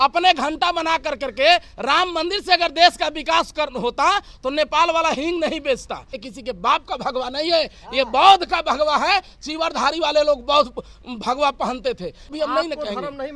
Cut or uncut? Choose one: cut